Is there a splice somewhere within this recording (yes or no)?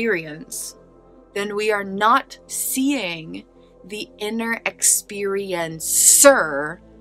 no